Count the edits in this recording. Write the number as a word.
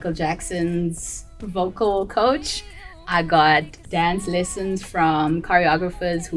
one